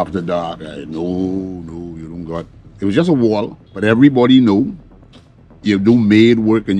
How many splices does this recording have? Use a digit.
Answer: 1